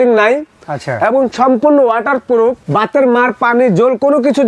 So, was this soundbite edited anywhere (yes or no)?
yes